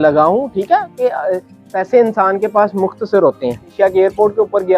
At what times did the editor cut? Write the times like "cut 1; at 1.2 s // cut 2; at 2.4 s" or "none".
cut 1; at 3.7 s